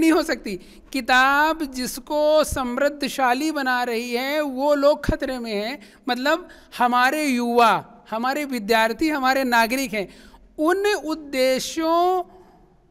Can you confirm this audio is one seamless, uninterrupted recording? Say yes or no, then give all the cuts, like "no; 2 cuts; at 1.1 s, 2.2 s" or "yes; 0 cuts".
yes; 0 cuts